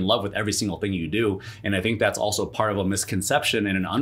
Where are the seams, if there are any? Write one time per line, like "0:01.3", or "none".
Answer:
none